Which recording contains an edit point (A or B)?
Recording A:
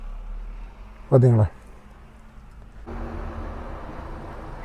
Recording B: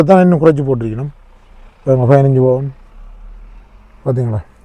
A